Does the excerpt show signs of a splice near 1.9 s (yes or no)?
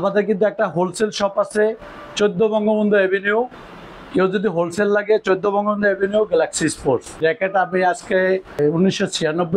no